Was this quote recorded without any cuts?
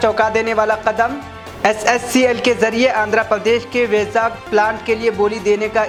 yes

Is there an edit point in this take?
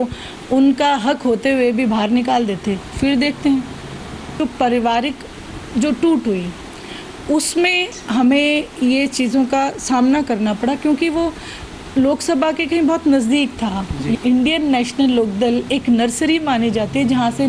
yes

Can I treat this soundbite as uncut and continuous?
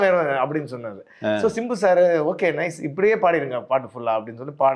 yes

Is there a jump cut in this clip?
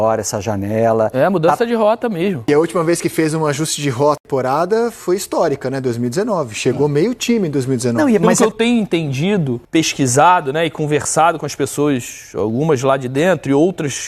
yes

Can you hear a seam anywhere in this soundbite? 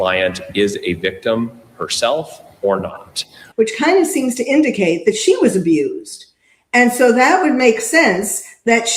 yes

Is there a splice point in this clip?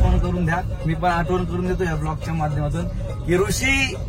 no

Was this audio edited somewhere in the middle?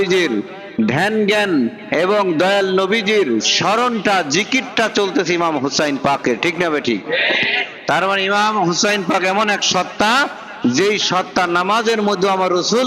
no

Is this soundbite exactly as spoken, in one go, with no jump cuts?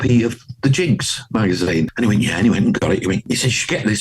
no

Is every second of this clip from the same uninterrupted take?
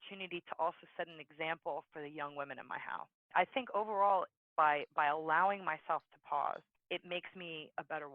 no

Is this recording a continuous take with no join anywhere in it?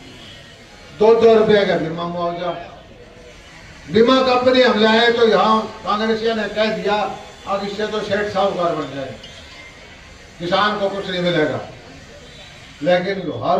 yes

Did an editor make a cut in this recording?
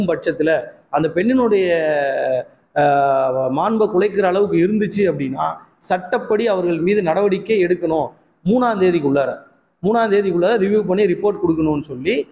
no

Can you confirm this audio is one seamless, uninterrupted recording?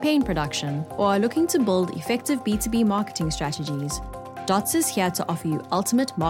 yes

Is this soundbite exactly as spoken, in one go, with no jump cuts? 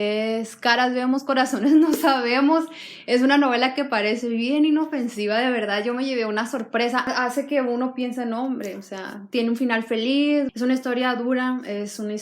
no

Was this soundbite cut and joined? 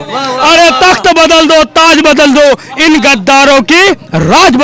no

